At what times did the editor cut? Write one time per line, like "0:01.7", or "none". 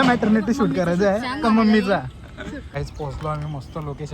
0:02.7